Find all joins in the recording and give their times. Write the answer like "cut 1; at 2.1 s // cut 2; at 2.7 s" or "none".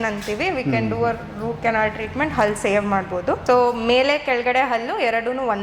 cut 1; at 3.4 s